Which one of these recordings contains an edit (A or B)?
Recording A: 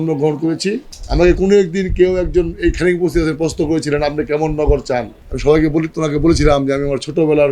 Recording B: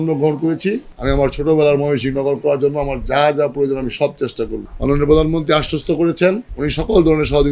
B